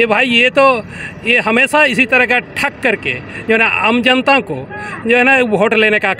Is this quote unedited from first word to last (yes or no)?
yes